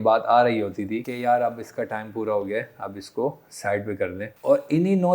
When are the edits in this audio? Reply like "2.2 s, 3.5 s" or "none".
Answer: 1.1 s, 4.3 s